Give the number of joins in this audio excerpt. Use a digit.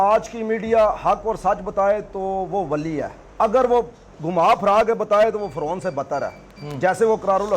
0